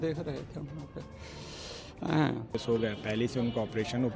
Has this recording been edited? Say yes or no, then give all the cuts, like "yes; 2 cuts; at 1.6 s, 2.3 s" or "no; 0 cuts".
yes; 1 cut; at 2.6 s